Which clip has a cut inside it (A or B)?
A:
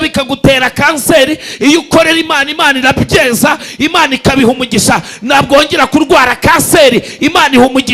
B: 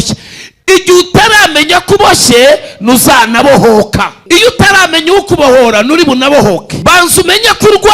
B